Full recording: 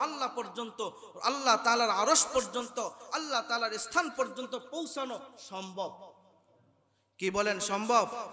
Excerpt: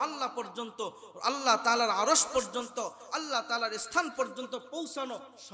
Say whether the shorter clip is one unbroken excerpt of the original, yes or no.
yes